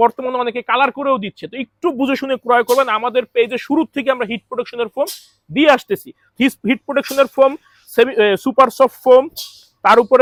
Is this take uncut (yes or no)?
yes